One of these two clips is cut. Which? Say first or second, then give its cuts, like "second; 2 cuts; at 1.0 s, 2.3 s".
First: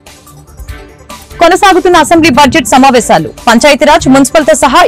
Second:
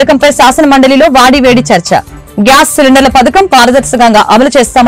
first; 1 cut; at 1.0 s